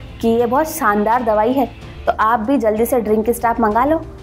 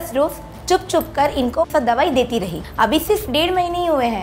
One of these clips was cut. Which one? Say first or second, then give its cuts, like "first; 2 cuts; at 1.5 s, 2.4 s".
second; 2 cuts; at 1.7 s, 2.6 s